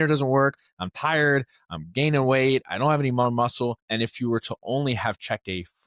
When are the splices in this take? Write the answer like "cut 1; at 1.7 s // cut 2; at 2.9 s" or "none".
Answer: cut 1; at 3.8 s